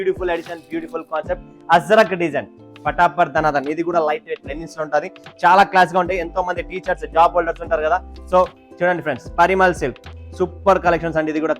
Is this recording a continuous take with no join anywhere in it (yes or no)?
no